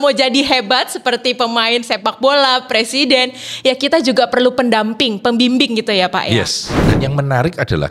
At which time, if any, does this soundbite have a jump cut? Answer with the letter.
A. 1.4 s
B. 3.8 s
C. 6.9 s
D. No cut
C